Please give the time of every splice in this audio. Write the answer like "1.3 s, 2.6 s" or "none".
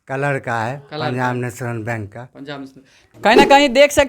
3.2 s